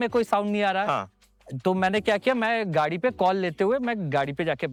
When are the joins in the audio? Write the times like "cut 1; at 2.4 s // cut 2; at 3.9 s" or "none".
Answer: none